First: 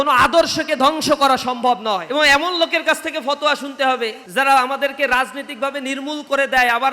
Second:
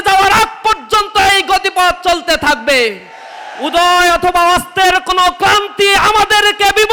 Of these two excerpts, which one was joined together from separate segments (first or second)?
first